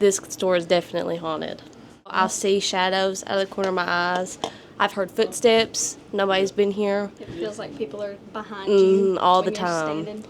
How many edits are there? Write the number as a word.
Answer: one